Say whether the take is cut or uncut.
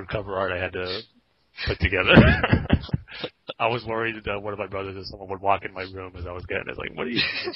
uncut